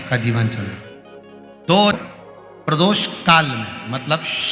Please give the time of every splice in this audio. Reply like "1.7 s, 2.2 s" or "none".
1.9 s